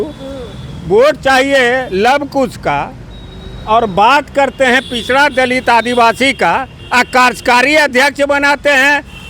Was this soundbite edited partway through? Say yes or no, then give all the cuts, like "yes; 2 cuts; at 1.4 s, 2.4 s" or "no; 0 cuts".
no; 0 cuts